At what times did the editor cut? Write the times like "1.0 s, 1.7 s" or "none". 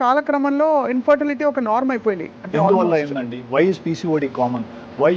2.3 s